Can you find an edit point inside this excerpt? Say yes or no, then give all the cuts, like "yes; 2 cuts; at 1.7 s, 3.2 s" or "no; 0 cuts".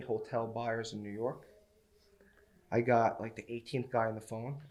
no; 0 cuts